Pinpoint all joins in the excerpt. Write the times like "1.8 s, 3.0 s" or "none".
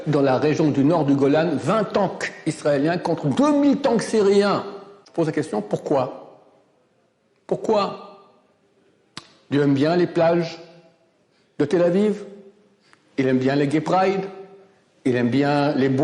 5.0 s